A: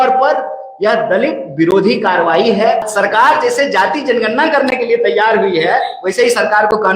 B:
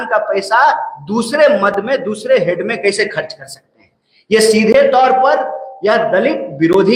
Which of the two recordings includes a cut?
A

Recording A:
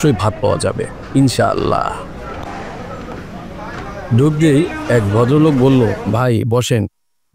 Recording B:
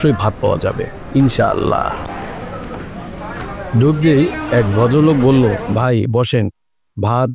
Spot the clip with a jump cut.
B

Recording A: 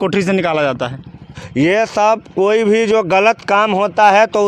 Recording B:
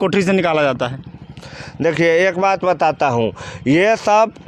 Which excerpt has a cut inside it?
A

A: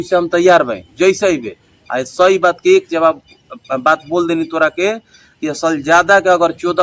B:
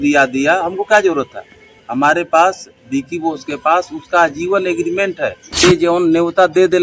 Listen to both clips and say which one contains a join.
B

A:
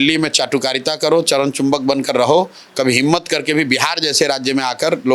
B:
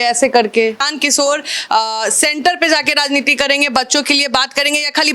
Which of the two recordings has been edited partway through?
B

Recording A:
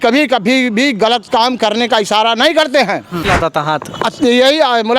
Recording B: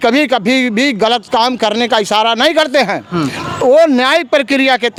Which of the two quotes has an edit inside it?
A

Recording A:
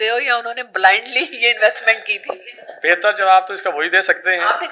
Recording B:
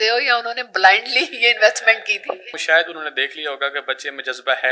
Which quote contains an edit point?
B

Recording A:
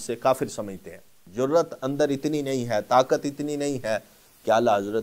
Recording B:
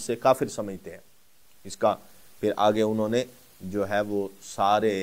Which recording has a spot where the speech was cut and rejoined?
A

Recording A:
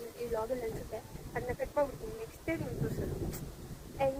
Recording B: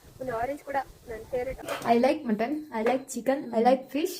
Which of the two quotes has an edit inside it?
B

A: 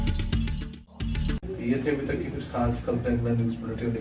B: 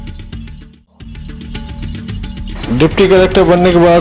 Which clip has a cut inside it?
B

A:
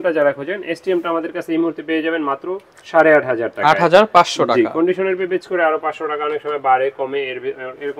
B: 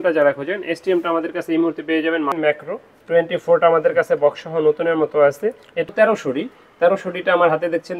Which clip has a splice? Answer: B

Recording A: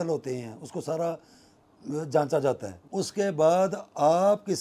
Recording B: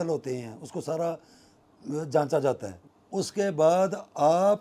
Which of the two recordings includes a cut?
A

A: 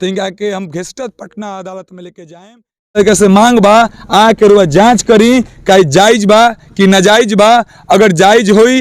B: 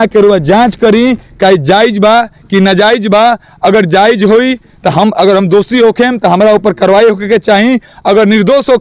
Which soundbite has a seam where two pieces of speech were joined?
A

